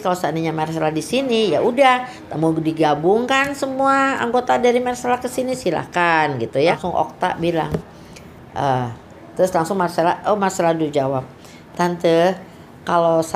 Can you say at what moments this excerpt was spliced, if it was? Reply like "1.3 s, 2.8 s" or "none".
6.8 s